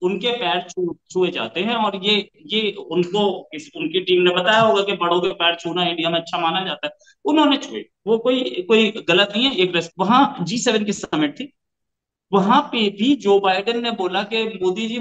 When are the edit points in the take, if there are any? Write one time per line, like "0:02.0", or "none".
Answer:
0:09.8